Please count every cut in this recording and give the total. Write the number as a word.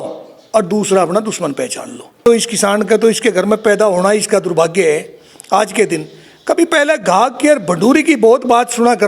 one